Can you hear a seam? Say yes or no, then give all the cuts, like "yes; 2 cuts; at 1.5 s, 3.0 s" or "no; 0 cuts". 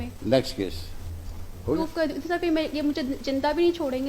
yes; 1 cut; at 1.8 s